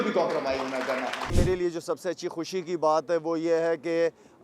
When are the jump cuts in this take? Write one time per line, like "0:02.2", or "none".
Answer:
0:01.3